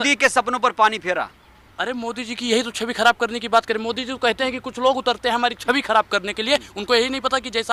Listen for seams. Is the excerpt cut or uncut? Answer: uncut